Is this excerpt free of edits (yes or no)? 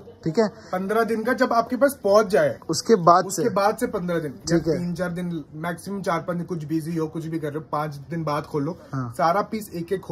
yes